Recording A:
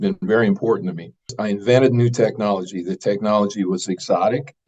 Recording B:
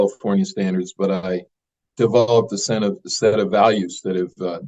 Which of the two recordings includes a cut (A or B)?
A